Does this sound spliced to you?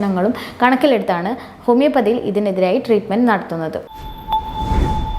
yes; 1 cut; at 3.8 s

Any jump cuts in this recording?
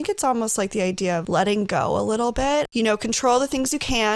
yes; 2 cuts; at 1.2 s, 2.7 s

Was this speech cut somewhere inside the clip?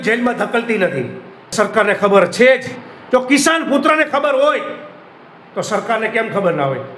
yes; 1 cut; at 1.5 s

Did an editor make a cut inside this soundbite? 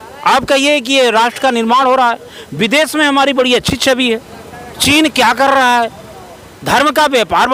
no; 0 cuts

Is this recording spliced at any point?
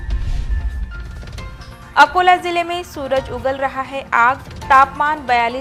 no; 0 cuts

